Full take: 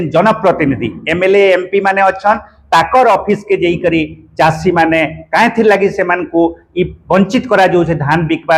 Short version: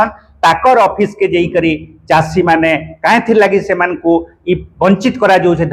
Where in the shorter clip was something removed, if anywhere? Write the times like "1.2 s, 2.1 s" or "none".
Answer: none